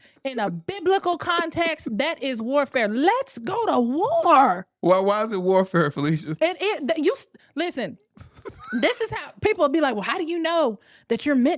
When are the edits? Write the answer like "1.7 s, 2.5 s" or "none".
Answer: 4.7 s